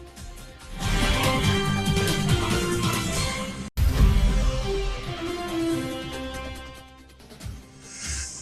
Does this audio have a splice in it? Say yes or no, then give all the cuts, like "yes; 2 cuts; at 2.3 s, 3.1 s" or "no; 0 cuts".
no; 0 cuts